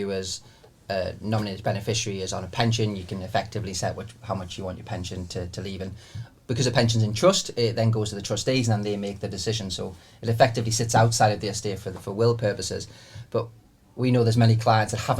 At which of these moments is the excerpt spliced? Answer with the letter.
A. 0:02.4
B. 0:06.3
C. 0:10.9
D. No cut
D